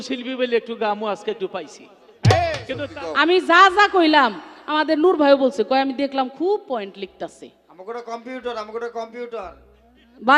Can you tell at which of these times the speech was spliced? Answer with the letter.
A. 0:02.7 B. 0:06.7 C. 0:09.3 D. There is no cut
A